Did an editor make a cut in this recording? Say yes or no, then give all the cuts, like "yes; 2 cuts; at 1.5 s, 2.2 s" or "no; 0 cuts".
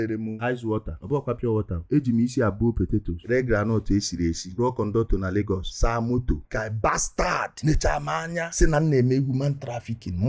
yes; 1 cut; at 3.1 s